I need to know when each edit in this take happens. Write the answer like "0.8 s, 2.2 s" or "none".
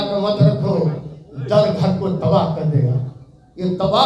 none